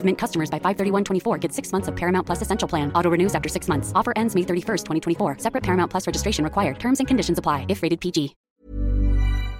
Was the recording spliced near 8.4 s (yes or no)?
yes